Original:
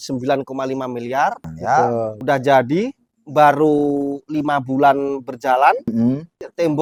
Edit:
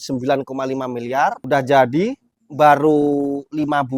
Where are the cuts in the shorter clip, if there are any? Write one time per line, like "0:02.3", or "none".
0:01.4